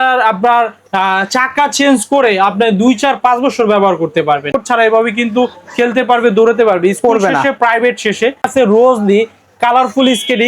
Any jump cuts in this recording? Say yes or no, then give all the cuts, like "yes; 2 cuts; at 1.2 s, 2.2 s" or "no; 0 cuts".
yes; 2 cuts; at 4.5 s, 8.5 s